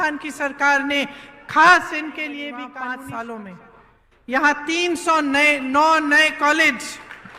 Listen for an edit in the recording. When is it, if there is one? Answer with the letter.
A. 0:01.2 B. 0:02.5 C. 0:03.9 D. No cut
B